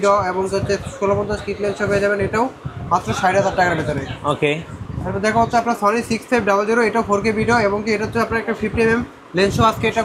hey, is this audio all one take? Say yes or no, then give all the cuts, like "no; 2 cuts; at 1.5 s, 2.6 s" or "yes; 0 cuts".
yes; 0 cuts